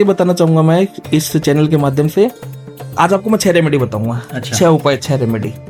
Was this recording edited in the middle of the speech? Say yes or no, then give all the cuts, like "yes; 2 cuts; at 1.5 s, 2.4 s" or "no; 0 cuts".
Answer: no; 0 cuts